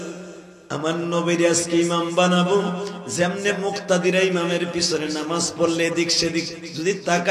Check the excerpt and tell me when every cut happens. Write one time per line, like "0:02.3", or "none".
none